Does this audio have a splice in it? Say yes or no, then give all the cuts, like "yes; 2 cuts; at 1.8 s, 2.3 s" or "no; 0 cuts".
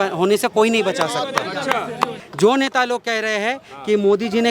yes; 1 cut; at 2.2 s